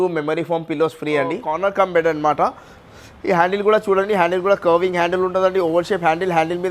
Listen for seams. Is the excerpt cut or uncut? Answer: cut